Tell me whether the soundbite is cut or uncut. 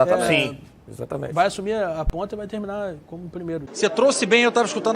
cut